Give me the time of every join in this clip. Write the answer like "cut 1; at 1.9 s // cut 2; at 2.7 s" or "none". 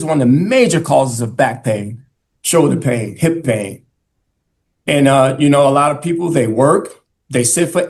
none